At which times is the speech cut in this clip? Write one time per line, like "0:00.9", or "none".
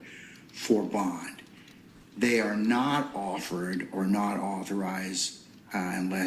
0:02.4